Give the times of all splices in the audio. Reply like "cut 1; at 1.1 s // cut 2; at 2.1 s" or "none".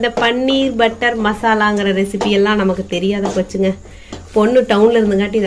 none